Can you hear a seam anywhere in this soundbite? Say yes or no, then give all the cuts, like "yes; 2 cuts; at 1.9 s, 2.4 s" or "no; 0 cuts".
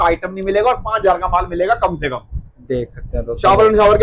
no; 0 cuts